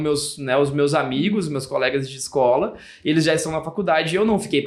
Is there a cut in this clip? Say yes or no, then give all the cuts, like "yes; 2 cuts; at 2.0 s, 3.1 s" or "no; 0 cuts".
no; 0 cuts